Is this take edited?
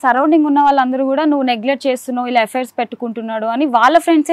no; 0 cuts

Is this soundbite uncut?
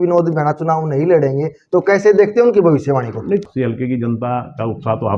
no; 1 cut; at 3.4 s

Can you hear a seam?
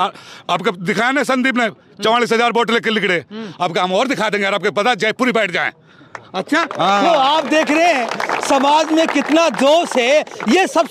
no; 0 cuts

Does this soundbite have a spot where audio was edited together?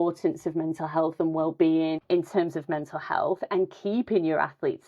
yes; 1 cut; at 2.0 s

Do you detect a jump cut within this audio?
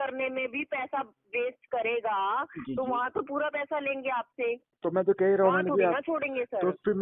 no; 0 cuts

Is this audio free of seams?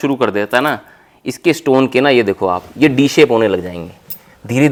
yes; 0 cuts

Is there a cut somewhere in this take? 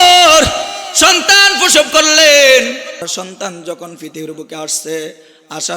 yes; 1 cut; at 3.0 s

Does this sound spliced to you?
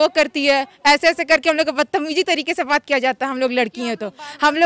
no; 0 cuts

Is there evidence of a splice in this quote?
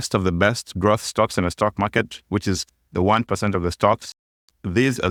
no; 0 cuts

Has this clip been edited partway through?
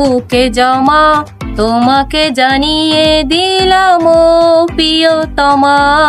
no; 0 cuts

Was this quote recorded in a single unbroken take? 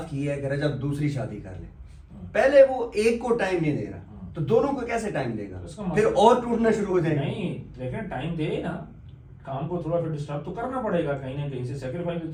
yes; 0 cuts

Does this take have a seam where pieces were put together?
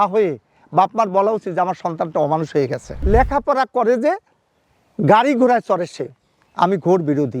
yes; 1 cut; at 2.9 s

